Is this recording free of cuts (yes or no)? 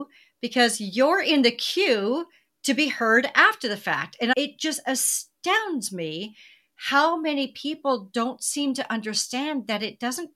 no